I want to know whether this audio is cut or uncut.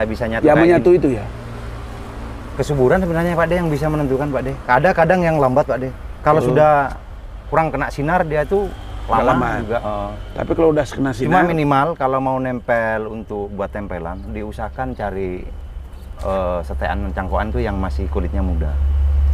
uncut